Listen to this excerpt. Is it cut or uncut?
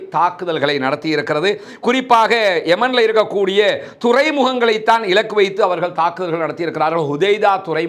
uncut